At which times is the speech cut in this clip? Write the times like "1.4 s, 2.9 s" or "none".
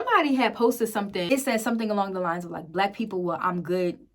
1.3 s